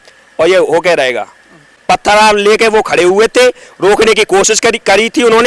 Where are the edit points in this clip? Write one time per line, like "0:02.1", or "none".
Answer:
0:01.7